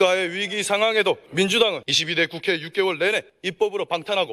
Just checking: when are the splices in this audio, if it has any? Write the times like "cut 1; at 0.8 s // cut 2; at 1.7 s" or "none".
cut 1; at 1.3 s // cut 2; at 1.9 s // cut 3; at 3.4 s